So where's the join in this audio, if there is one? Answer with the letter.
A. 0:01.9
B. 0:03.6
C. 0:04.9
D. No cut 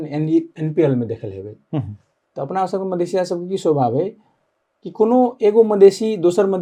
D